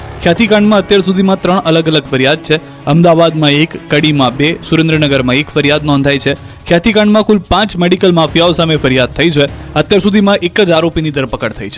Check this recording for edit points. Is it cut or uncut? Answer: uncut